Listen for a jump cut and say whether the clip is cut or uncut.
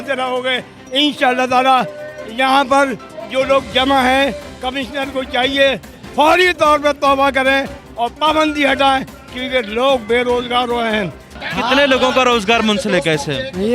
cut